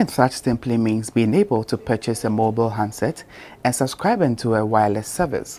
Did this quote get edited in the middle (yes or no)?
no